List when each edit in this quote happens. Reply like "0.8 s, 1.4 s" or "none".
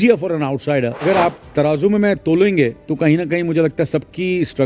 1.0 s, 2.8 s